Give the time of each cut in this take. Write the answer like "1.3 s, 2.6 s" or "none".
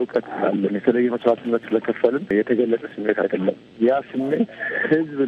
2.3 s, 3.7 s

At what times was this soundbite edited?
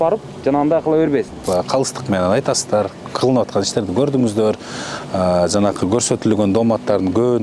1.4 s

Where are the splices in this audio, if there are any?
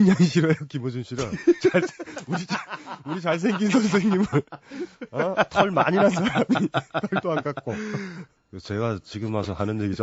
none

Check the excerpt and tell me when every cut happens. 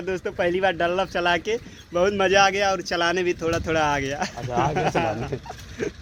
none

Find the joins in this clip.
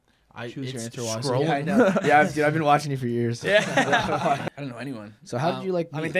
4.4 s

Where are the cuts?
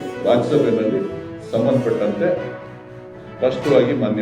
none

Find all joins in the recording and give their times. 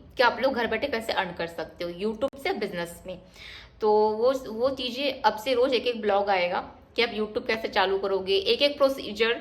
none

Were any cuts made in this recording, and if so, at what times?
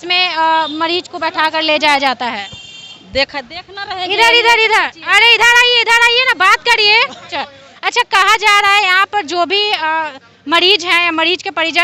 7.4 s

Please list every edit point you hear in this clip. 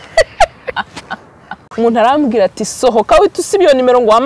1.7 s

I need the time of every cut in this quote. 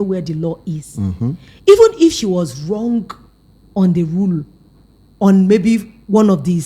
none

